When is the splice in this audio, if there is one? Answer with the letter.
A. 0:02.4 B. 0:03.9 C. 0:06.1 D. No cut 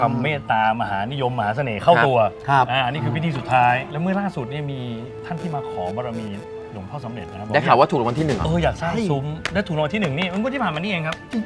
B